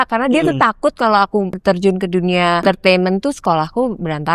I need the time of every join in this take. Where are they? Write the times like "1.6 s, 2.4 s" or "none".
1.5 s, 2.6 s